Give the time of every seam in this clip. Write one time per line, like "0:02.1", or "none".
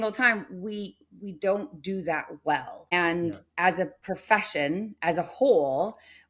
0:02.9